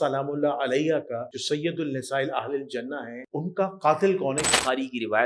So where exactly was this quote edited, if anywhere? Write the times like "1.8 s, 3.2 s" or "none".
1.3 s, 3.2 s, 4.5 s